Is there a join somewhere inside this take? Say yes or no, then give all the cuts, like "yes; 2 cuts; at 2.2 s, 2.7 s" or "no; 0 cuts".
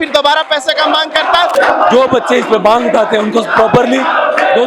yes; 1 cut; at 1.5 s